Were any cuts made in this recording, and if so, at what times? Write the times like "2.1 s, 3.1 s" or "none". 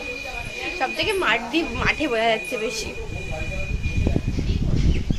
none